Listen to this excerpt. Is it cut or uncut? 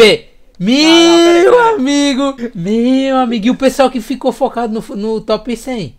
uncut